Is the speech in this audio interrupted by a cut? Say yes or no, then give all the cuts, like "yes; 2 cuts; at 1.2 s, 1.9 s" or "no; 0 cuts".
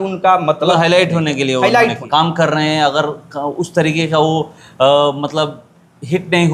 yes; 1 cut; at 2.0 s